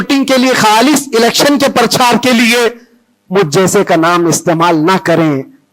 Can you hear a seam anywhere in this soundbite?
no; 0 cuts

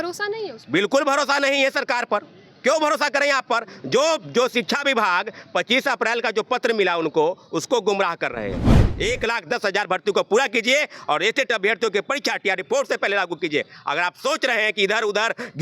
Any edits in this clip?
yes; 1 cut; at 8.9 s

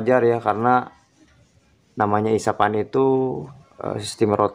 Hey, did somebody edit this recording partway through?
no; 0 cuts

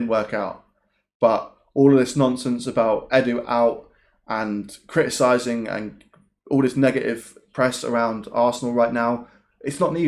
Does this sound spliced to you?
no; 0 cuts

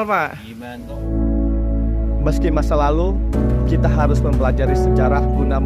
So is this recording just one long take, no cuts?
no; 1 cut; at 1.0 s

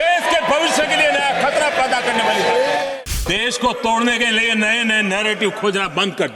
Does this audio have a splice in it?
yes; 1 cut; at 2.9 s

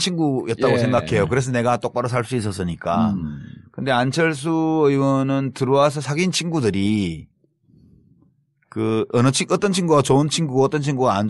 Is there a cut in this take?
yes; 1 cut; at 5.8 s

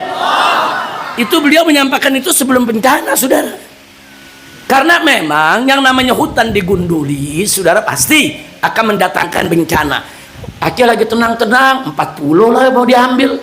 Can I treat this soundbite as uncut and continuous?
no; 1 cut; at 10.2 s

